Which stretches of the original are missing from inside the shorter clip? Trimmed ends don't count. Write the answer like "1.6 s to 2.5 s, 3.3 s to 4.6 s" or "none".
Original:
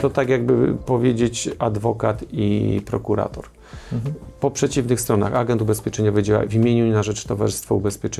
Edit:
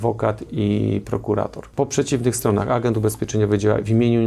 3.4 s to 4.3 s